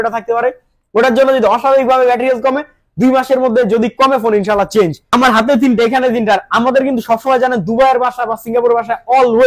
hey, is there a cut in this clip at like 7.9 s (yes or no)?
no